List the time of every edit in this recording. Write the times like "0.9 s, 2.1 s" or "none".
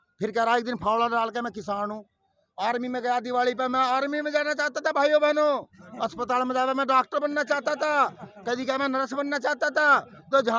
none